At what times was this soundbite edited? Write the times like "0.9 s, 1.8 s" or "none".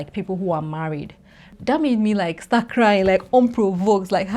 1.6 s